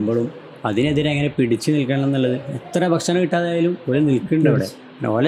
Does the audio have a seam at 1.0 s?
no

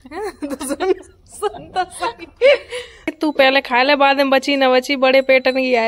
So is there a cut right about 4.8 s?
no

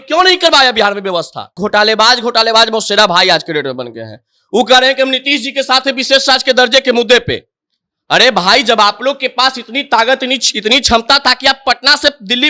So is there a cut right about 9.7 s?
no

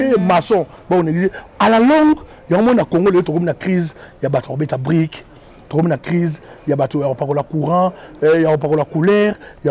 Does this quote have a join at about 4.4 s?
no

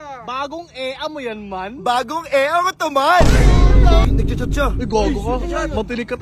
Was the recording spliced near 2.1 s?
no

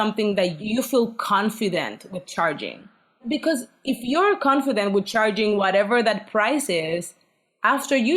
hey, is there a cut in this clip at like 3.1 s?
yes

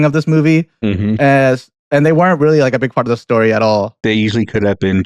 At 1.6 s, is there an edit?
no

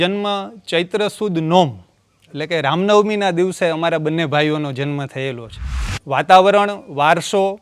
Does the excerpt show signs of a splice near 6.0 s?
yes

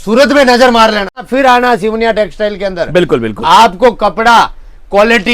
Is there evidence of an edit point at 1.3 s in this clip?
yes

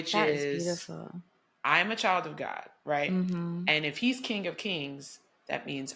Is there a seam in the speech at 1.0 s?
no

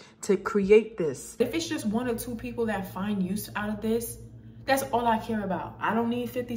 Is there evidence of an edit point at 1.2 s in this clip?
yes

